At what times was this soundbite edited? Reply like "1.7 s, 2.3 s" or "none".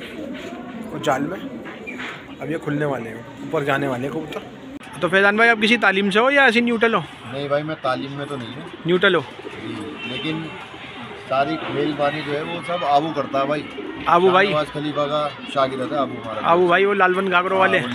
5.1 s